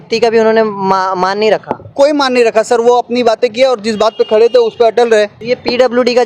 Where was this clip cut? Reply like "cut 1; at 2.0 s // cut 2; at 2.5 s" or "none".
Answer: cut 1; at 5.4 s